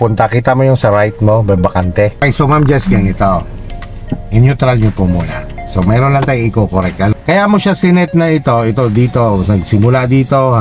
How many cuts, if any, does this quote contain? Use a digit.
2